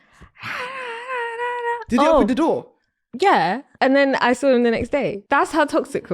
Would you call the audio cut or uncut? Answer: cut